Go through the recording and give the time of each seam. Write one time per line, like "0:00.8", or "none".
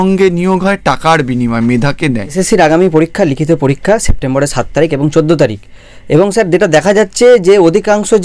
0:02.3